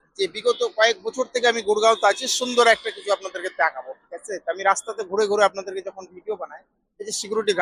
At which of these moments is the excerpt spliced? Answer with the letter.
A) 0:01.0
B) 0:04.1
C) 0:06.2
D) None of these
D